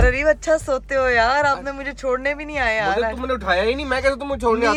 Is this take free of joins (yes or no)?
yes